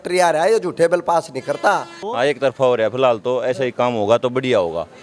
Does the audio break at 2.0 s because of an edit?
yes; 1 cut; at 2.0 s

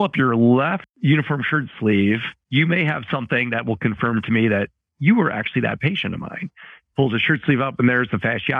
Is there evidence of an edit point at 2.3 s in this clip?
yes; 2 cuts; at 0.9 s, 2.3 s

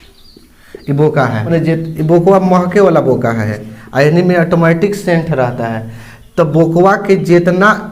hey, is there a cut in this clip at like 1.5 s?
yes; 2 cuts; at 1.5 s, 3.5 s

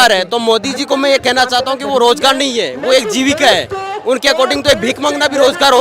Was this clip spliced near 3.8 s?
no; 0 cuts

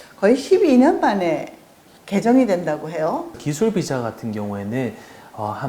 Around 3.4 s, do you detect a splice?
yes; 1 cut; at 3.4 s

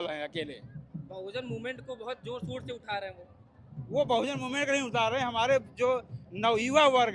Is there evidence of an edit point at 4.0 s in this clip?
no; 0 cuts

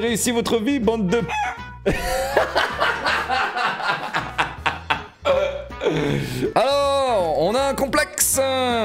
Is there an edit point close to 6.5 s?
yes; 1 cut; at 6.5 s

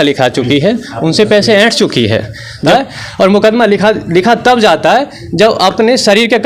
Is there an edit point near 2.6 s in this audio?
yes; 1 cut; at 2.6 s

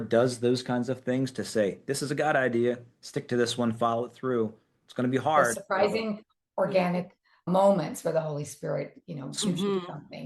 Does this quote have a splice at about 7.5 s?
yes; 1 cut; at 7.5 s

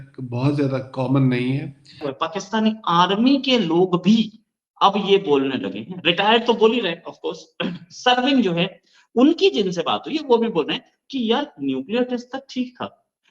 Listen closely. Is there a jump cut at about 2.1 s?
yes; 1 cut; at 2.1 s

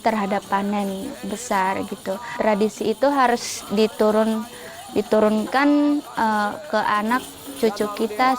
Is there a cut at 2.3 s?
yes; 1 cut; at 2.3 s

